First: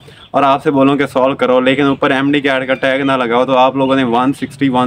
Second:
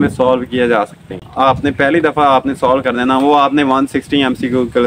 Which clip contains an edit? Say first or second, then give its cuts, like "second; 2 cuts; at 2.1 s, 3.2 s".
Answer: second; 1 cut; at 1.3 s